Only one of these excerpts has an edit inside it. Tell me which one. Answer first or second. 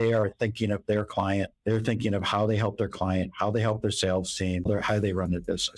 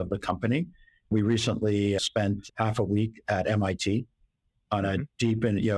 first